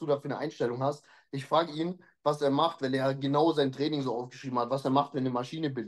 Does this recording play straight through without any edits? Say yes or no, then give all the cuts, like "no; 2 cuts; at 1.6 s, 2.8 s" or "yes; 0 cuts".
yes; 0 cuts